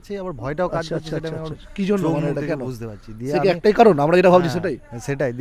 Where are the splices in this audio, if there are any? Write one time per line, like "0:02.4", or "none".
none